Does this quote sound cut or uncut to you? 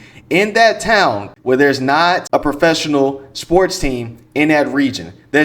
cut